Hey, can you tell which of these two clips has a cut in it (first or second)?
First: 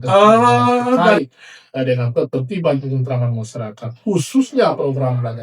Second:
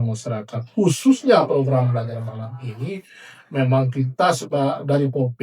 first